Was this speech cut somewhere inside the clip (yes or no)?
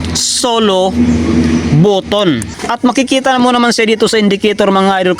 yes